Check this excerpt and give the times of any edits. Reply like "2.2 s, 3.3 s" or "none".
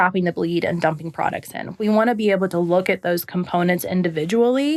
none